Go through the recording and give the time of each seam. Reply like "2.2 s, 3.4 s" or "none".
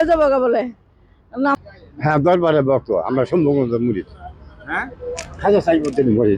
1.5 s